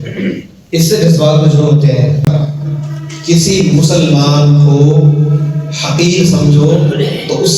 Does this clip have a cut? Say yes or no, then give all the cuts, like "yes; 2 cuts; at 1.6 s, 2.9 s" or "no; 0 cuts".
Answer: yes; 1 cut; at 2.3 s